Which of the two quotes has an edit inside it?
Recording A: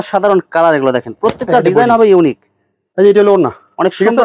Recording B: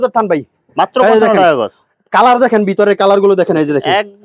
A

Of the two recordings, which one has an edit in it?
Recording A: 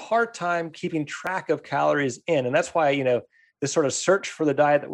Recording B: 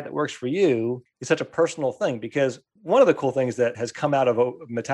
B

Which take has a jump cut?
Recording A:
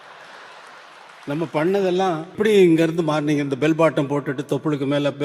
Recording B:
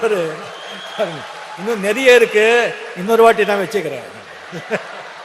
A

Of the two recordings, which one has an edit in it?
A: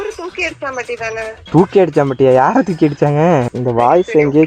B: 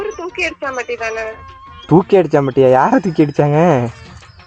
A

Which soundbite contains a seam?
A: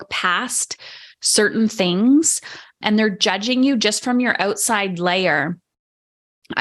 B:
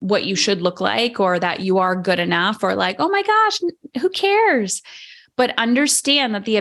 A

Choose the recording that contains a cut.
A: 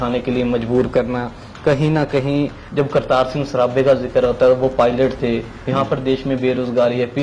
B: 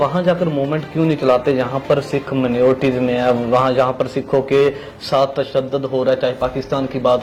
A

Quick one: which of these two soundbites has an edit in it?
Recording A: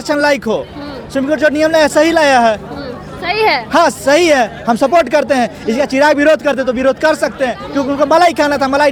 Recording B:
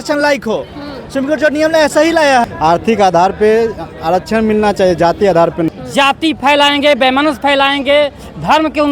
B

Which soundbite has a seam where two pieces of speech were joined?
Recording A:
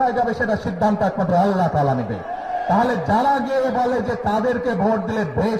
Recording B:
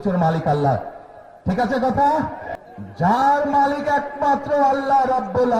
B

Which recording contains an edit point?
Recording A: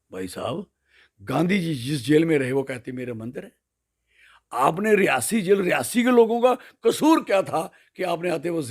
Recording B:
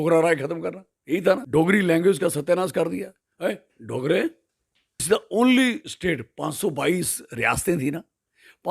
B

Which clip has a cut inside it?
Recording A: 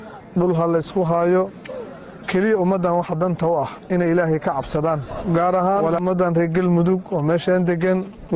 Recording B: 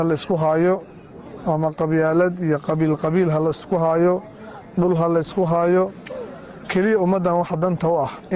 A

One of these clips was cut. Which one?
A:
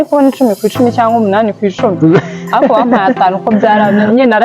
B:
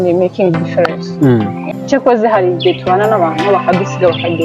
B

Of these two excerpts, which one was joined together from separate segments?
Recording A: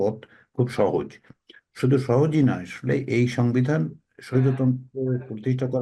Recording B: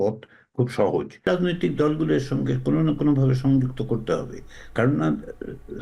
B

